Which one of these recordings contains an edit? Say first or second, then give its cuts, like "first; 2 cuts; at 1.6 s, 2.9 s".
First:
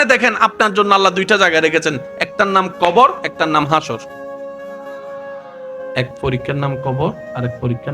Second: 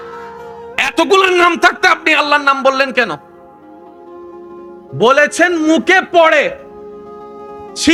first; 2 cuts; at 4.2 s, 5.8 s